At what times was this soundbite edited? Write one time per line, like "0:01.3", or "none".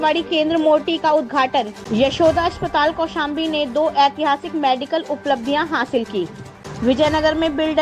0:01.8
0:06.7